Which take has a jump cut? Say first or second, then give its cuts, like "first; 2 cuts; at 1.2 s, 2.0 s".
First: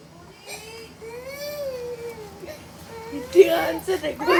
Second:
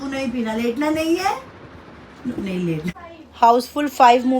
second; 1 cut; at 3.0 s